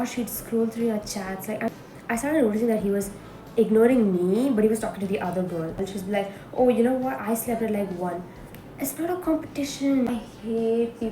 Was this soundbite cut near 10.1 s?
yes; 3 cuts; at 1.7 s, 5.8 s, 10.1 s

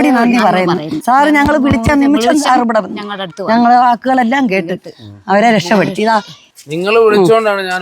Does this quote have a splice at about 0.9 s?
yes; 1 cut; at 0.9 s

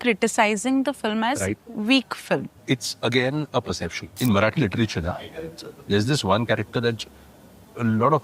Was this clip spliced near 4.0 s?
yes; 2 cuts; at 2.6 s, 4.0 s

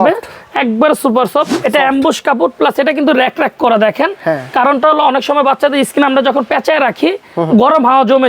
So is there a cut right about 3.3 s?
no; 1 cut; at 1.5 s

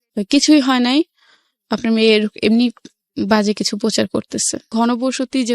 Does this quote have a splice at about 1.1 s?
no; 1 cut; at 4.6 s

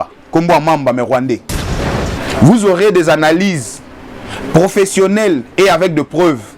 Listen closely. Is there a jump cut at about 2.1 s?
yes; 1 cut; at 2.1 s

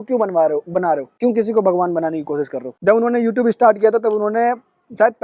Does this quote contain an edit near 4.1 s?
no; 2 cuts; at 1.1 s, 2.7 s

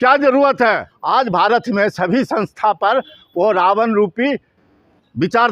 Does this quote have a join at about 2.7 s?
no; 1 cut; at 0.9 s

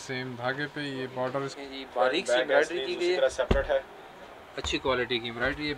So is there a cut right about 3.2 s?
no; 1 cut; at 1.5 s

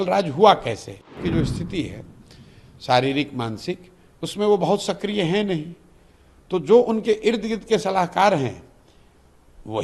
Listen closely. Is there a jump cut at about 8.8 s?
no; 1 cut; at 1.2 s

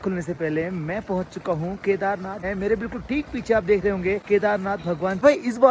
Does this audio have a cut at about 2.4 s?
yes; 2 cuts; at 2.4 s, 4.6 s

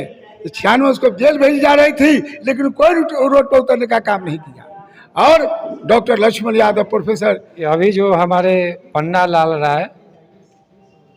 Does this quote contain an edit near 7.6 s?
yes; 1 cut; at 7.6 s

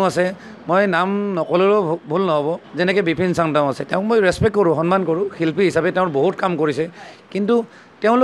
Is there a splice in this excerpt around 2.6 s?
yes; 1 cut; at 2.6 s

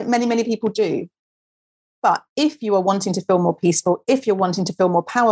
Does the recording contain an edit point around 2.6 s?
no; 0 cuts

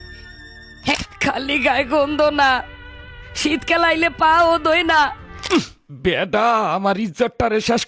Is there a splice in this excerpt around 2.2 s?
no; 2 cuts; at 0.9 s, 5.4 s

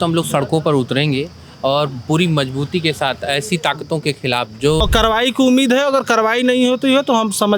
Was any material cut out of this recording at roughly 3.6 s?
no; 1 cut; at 4.8 s

